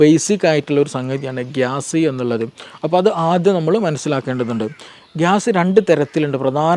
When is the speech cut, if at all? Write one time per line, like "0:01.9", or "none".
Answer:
0:04.9